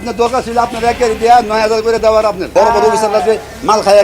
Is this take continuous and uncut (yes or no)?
no